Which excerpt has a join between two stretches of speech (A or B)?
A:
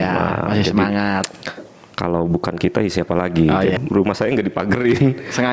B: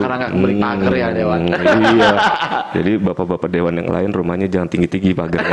A